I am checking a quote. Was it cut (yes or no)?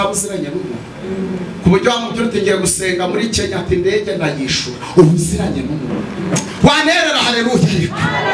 no